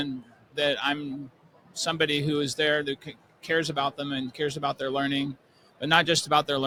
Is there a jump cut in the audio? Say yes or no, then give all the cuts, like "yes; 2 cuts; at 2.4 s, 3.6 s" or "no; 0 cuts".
no; 0 cuts